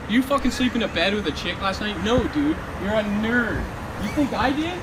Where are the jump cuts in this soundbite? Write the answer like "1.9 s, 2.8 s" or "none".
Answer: none